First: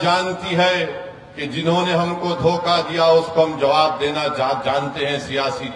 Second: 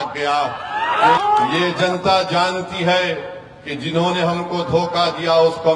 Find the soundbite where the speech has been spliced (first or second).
second